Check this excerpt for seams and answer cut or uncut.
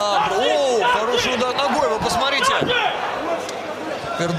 cut